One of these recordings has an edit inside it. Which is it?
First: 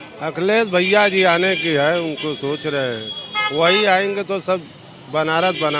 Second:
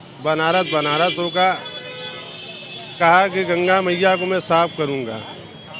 second; 1 cut; at 2.9 s

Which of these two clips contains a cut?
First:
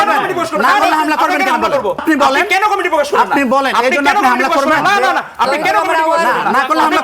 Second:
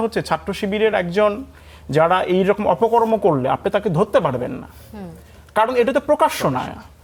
first; 1 cut; at 2.0 s

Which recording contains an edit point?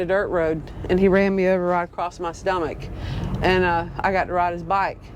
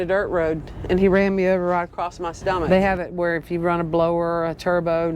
second; 1 cut; at 2.6 s

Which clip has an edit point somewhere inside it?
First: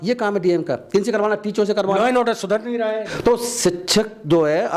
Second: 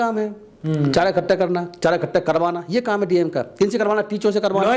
first; 1 cut; at 3.1 s

